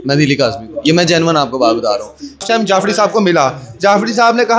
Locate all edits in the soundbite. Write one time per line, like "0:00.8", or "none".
0:02.4